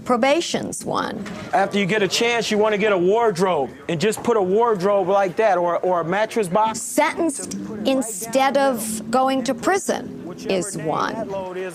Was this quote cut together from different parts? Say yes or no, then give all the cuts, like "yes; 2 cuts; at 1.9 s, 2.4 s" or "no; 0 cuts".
no; 0 cuts